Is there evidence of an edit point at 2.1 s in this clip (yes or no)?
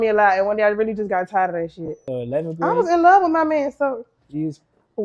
yes